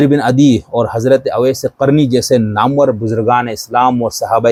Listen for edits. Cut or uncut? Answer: uncut